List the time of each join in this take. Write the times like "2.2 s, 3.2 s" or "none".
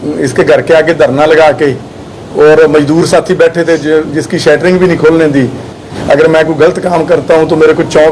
5.9 s